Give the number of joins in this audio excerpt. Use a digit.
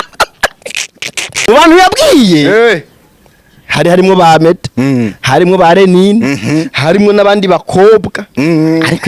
1